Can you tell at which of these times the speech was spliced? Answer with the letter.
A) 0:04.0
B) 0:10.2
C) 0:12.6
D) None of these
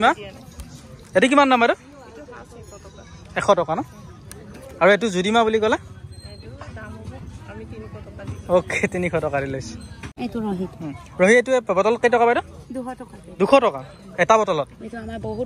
B